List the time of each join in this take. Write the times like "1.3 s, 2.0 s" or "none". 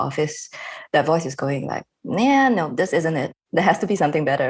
3.3 s

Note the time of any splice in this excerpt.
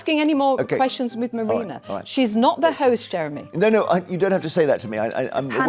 none

